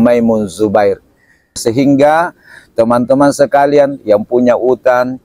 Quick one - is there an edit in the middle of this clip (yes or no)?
yes